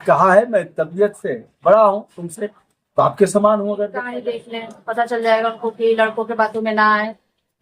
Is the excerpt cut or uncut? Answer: cut